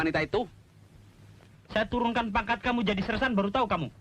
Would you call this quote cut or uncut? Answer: cut